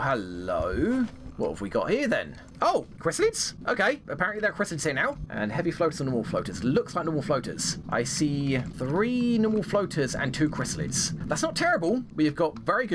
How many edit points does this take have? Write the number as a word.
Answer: zero